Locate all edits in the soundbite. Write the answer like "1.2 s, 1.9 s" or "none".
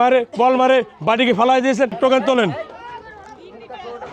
1.9 s